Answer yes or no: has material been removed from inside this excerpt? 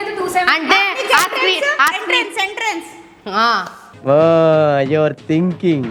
no